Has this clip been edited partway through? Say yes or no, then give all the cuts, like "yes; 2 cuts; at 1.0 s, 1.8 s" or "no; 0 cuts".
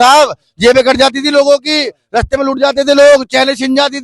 no; 0 cuts